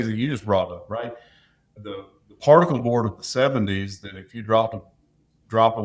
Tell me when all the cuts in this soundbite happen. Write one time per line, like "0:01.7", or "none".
0:01.8